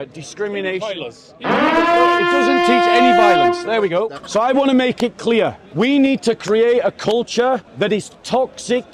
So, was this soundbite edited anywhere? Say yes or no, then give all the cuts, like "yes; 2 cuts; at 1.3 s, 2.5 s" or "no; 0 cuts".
yes; 3 cuts; at 4.2 s, 5.6 s, 7.7 s